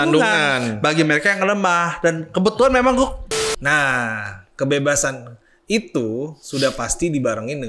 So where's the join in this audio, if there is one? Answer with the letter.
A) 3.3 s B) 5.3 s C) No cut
A